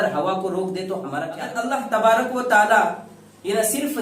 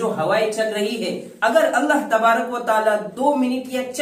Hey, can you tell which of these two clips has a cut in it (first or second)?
first